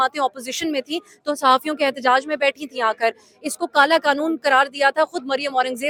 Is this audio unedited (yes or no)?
yes